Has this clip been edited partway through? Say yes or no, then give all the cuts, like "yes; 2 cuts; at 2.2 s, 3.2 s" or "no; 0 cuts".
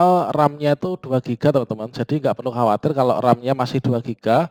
no; 0 cuts